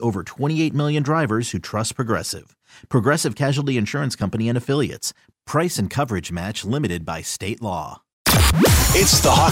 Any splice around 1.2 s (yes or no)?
no